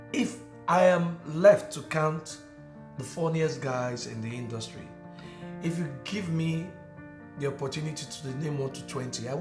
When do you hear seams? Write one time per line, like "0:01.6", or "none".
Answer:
none